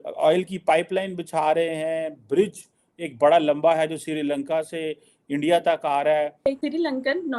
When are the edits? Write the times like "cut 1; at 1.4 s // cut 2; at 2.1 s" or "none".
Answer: cut 1; at 6.5 s